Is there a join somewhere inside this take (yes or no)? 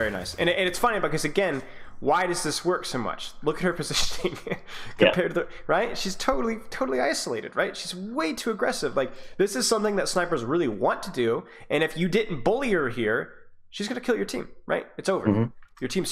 no